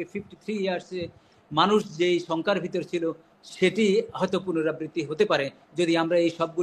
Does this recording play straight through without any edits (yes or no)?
yes